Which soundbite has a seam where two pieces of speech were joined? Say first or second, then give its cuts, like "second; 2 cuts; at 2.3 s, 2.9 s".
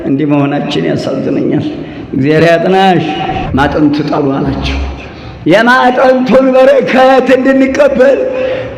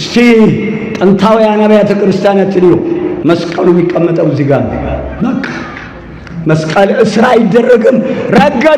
first; 1 cut; at 3.4 s